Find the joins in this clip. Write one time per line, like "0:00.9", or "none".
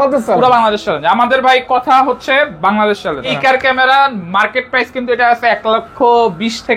0:03.3